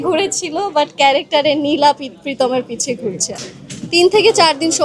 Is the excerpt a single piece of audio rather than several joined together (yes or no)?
no